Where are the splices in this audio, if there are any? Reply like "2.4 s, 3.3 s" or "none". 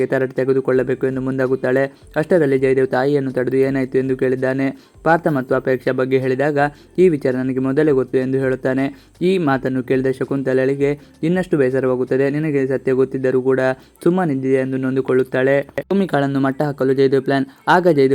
15.8 s